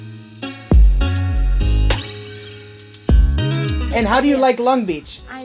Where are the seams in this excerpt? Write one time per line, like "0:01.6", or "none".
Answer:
0:03.8